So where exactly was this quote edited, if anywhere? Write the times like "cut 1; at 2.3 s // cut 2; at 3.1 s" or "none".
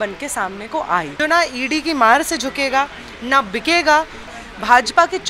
cut 1; at 1.1 s // cut 2; at 4.2 s